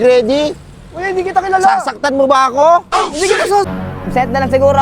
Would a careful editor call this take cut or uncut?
cut